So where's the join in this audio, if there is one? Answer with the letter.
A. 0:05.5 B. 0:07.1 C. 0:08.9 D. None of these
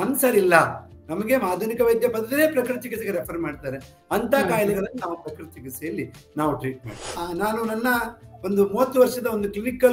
B